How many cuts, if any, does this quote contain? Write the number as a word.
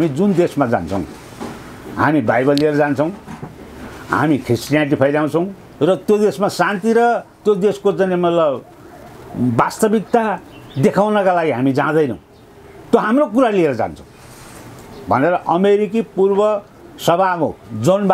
zero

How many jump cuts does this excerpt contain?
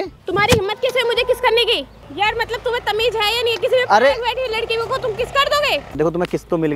two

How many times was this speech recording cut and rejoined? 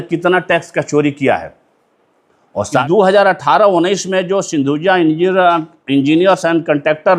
one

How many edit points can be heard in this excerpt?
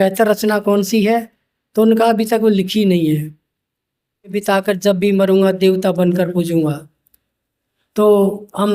one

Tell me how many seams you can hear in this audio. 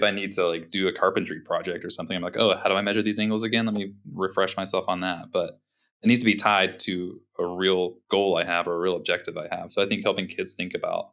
zero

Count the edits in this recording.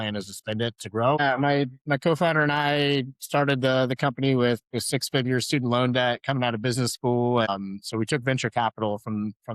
two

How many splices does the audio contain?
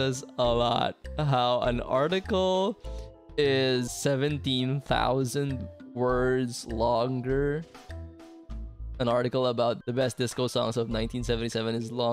two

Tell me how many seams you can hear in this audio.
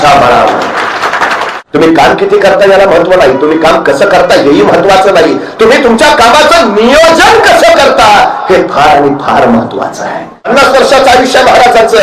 two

